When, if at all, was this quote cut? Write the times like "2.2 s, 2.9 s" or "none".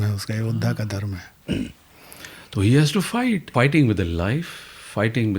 1.3 s, 3.5 s